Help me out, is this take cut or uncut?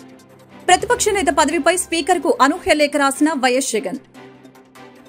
uncut